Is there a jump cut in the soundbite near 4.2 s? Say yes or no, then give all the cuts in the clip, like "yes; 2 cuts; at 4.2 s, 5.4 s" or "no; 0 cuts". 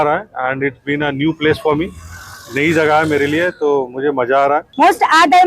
yes; 1 cut; at 4.2 s